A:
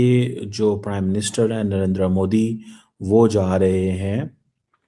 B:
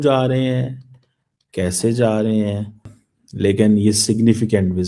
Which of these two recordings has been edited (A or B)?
B